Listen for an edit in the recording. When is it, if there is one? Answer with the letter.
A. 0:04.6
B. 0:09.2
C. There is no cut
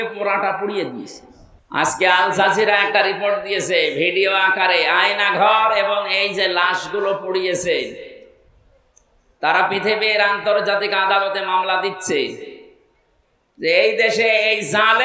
C